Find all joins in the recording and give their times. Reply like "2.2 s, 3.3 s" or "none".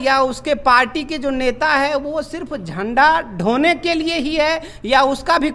none